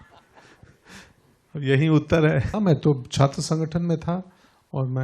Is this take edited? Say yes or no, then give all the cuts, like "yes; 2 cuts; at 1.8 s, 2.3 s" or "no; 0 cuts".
yes; 1 cut; at 2.5 s